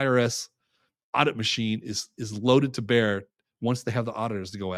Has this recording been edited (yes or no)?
no